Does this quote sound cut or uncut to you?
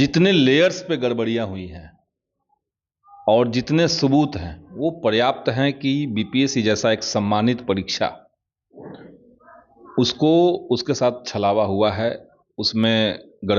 uncut